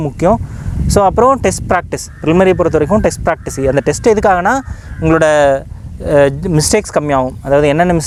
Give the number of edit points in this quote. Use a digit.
0